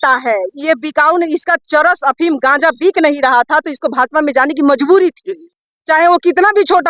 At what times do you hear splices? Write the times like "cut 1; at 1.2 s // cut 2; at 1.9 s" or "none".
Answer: cut 1; at 5.5 s